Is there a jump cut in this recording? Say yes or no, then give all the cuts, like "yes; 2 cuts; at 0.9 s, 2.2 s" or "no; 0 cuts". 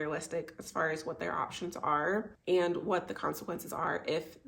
no; 0 cuts